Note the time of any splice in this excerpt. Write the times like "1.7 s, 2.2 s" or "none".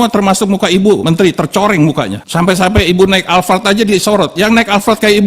1.0 s, 2.2 s